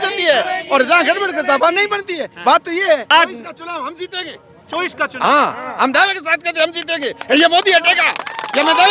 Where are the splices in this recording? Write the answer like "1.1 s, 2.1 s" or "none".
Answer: 3.1 s